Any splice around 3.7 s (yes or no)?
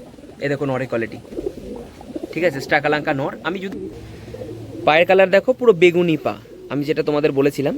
yes